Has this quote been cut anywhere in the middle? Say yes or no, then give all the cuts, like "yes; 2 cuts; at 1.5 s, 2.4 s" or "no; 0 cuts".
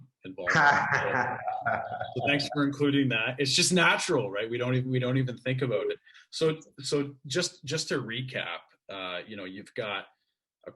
no; 0 cuts